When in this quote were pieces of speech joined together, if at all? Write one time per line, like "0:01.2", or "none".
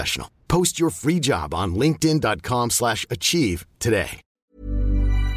0:04.4